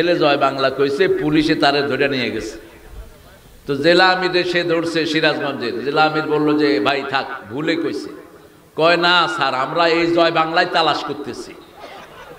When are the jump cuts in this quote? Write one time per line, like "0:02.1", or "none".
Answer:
none